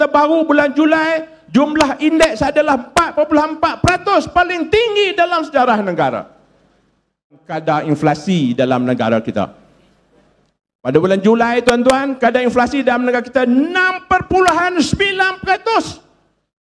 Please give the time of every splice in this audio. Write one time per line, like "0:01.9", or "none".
0:07.3

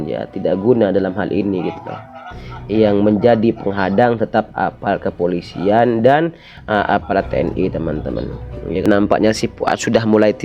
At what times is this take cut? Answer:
0:08.8

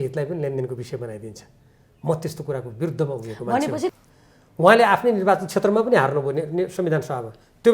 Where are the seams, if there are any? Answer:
0:03.9

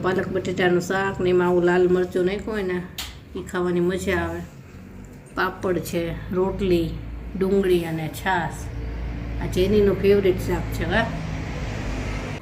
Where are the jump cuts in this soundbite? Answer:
none

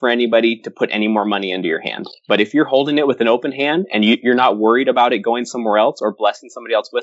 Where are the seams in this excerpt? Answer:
none

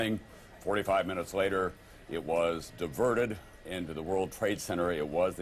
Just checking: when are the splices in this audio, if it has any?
0:02.5

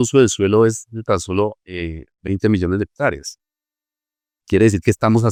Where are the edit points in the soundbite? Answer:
none

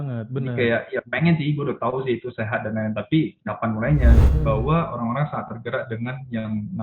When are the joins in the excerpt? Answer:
0:04.3

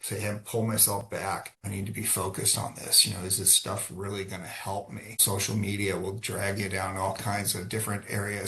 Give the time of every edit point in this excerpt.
0:01.6
0:05.2

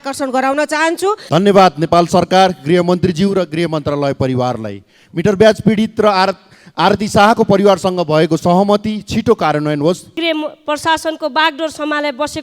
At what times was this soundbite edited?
0:01.2
0:10.1

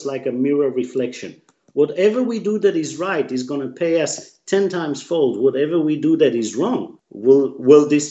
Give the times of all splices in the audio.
0:07.1

